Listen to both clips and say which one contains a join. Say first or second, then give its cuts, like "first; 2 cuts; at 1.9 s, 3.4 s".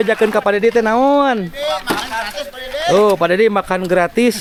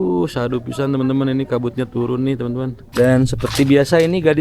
second; 1 cut; at 2.8 s